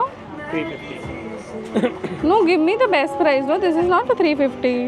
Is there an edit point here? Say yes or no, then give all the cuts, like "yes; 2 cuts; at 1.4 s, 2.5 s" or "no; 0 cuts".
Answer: no; 0 cuts